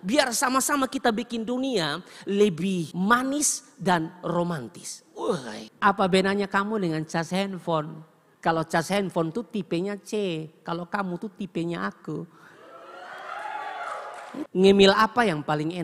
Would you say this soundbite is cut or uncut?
cut